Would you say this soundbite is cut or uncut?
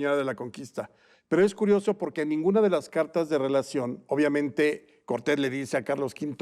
uncut